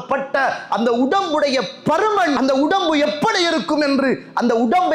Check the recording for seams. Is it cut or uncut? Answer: cut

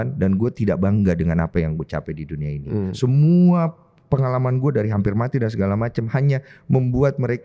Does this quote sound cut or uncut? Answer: uncut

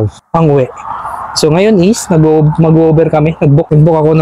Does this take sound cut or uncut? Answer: uncut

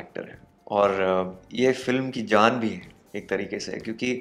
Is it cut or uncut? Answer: uncut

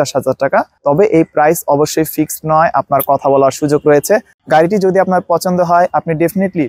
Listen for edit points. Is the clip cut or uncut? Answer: cut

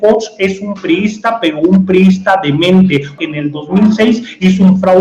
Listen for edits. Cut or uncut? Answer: cut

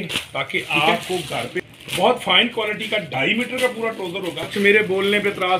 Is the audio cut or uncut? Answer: cut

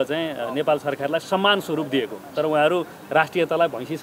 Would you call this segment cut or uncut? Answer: uncut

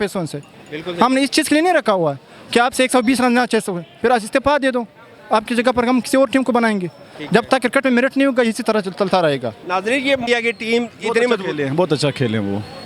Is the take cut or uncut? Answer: cut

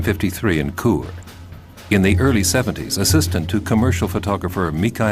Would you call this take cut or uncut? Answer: cut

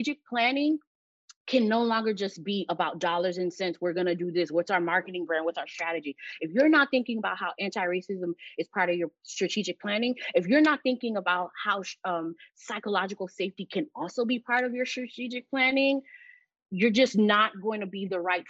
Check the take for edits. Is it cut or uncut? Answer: uncut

